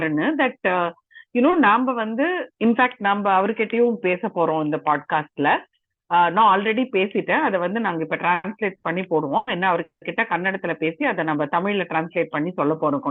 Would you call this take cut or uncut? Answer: uncut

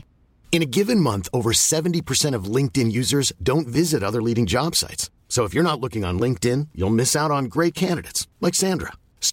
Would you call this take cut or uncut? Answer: uncut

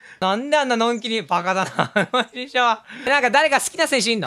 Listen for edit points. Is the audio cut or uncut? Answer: cut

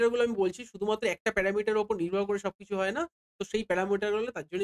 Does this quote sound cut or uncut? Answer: uncut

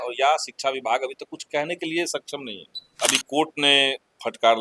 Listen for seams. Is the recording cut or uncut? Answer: cut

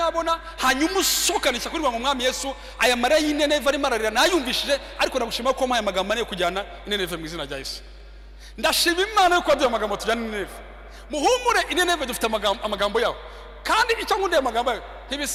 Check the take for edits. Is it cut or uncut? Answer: uncut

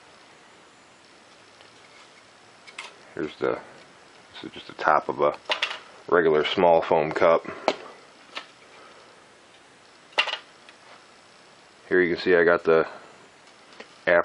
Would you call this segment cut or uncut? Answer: cut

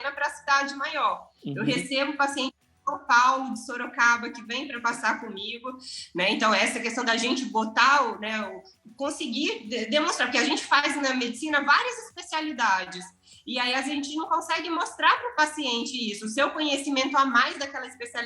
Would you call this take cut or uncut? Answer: uncut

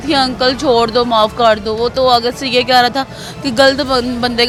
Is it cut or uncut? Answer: uncut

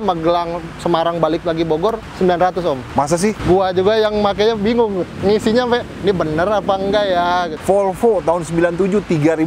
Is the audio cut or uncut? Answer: cut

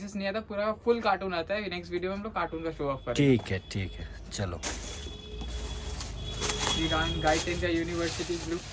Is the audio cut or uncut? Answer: uncut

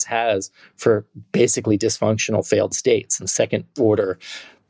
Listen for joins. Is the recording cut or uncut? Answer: cut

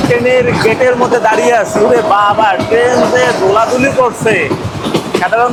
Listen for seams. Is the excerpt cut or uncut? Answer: uncut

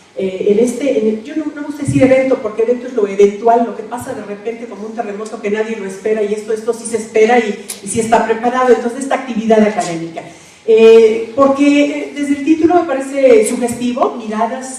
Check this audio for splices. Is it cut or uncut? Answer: uncut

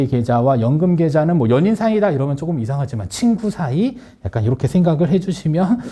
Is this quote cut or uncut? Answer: uncut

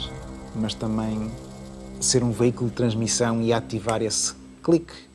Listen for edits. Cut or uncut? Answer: uncut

